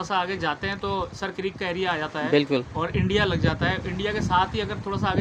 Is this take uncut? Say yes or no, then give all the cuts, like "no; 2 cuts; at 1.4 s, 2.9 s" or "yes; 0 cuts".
yes; 0 cuts